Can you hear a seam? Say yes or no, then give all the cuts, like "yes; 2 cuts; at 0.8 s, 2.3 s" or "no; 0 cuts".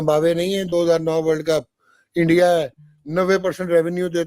no; 0 cuts